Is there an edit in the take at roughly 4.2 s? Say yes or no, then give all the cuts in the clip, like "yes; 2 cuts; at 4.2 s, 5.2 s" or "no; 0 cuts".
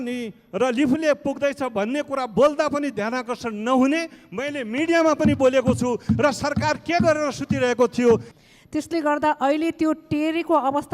no; 1 cut; at 8.3 s